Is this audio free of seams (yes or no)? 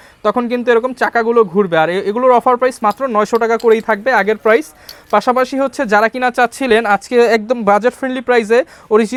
yes